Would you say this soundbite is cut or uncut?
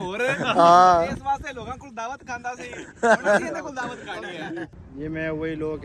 cut